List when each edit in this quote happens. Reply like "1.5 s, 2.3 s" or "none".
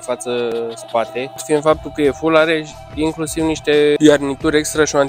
1.4 s, 4.0 s